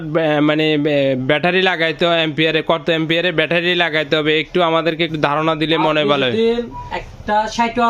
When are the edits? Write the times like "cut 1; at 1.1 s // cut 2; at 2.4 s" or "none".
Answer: none